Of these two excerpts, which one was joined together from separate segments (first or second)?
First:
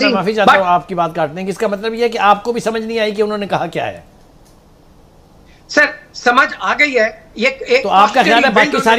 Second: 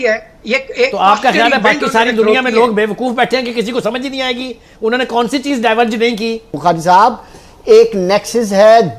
second